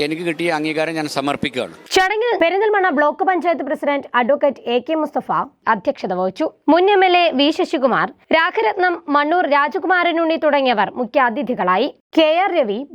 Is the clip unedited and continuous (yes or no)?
yes